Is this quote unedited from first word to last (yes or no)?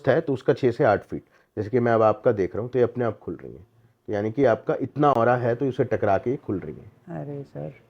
yes